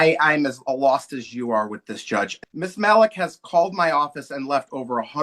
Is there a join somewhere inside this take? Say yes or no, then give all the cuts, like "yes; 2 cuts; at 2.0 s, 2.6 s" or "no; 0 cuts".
yes; 1 cut; at 2.4 s